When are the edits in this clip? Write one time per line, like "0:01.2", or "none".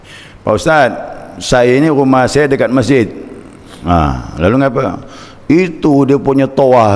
none